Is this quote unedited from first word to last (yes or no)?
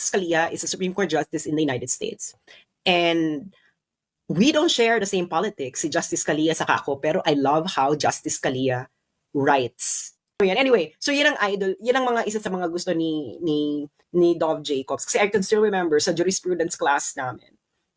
no